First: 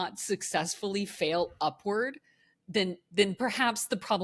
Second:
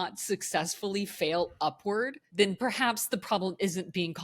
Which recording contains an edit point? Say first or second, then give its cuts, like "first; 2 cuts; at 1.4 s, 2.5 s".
second; 1 cut; at 2.2 s